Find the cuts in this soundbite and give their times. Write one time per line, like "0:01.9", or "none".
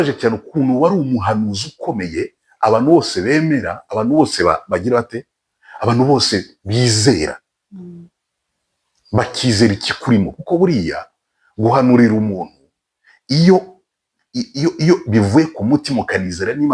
none